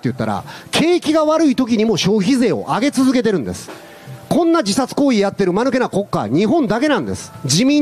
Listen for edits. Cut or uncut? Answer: uncut